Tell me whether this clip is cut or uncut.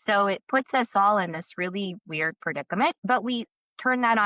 cut